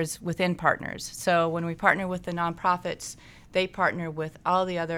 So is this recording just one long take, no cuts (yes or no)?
yes